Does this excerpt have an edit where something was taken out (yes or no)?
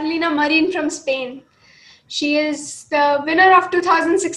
no